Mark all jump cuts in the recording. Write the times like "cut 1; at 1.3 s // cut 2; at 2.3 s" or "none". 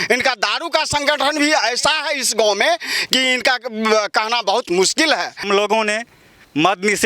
cut 1; at 5.4 s